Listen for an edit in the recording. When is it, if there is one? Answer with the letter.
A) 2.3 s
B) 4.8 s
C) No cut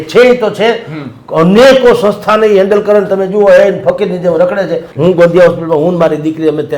B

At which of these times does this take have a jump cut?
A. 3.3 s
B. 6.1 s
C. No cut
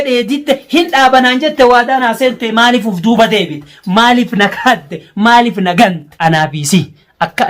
B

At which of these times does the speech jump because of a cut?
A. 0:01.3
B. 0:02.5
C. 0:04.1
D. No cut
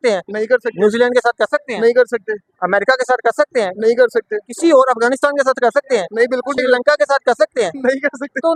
D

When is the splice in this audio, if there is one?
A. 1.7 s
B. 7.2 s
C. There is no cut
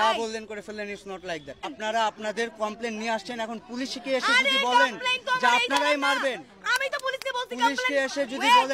A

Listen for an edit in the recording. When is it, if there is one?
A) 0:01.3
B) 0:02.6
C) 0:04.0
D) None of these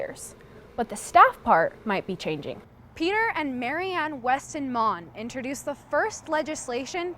B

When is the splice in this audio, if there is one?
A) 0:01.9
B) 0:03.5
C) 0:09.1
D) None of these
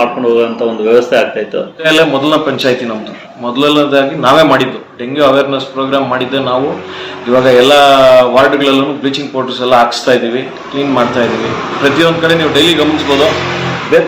A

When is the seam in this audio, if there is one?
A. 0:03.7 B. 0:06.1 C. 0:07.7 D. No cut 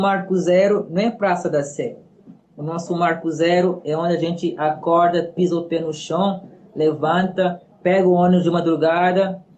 C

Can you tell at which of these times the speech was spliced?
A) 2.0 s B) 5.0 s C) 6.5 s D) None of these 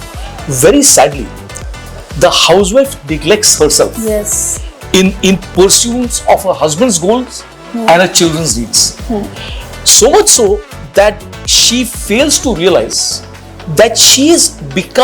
D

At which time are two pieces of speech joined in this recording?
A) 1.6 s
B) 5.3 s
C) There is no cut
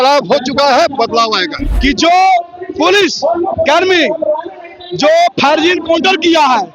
A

